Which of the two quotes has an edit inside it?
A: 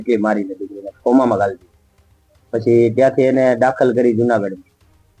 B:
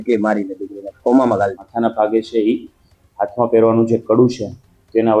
B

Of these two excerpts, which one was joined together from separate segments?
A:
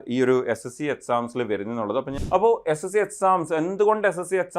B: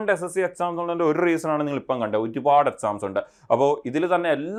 A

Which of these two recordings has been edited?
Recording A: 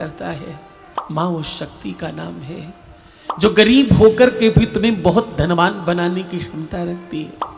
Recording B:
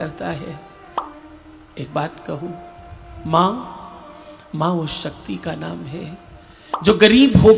A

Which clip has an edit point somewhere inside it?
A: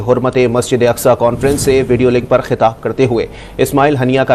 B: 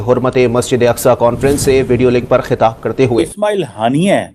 B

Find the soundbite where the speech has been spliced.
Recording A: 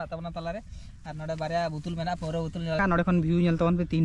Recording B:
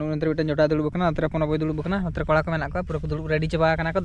A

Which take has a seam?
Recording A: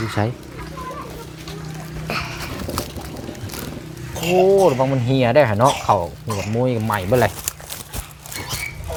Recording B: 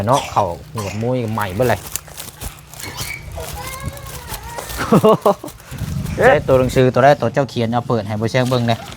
B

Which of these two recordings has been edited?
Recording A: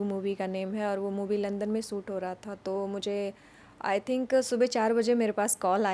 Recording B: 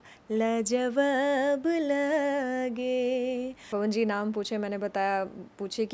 B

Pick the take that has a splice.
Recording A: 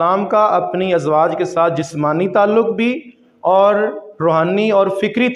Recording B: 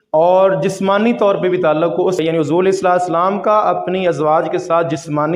B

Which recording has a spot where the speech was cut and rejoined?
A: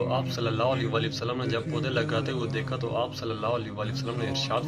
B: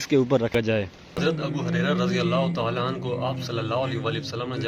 B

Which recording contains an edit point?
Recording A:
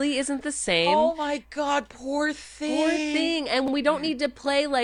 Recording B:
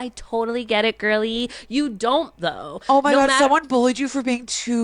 B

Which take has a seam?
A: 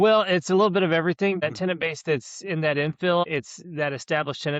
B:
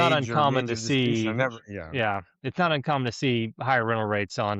A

